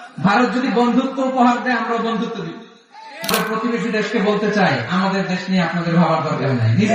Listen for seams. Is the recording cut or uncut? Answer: cut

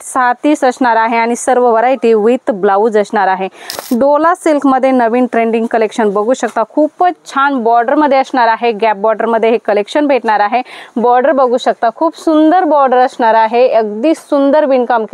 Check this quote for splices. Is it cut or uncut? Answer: cut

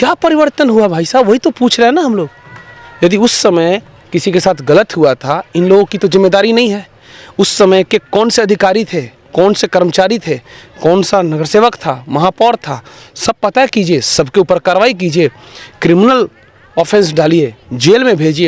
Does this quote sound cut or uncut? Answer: uncut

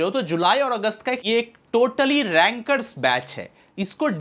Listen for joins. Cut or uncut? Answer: cut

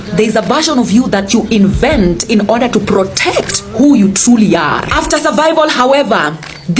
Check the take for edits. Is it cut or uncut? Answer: uncut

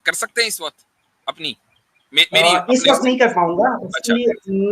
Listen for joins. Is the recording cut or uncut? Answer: uncut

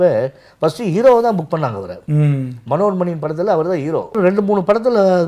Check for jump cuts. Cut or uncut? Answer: cut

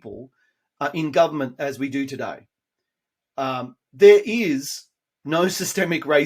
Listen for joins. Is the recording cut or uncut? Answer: uncut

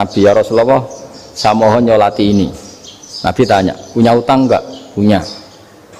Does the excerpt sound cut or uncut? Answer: uncut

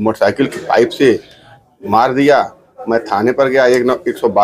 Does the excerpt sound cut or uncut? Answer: uncut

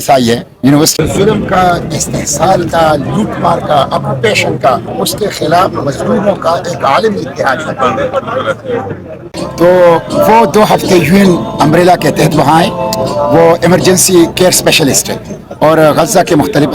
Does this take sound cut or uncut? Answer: cut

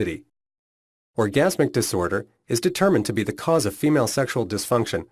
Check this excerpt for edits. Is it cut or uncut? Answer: uncut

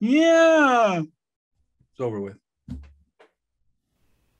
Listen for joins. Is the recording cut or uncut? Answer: uncut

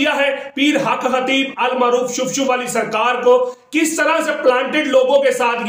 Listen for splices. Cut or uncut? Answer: uncut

